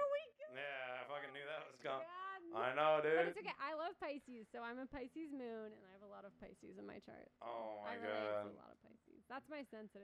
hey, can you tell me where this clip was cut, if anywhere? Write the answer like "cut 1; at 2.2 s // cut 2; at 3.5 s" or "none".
none